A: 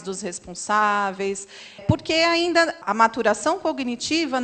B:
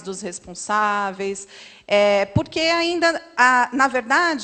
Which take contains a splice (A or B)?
A